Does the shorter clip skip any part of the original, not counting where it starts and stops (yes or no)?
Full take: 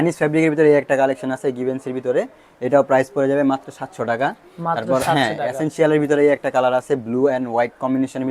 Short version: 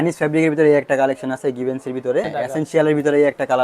yes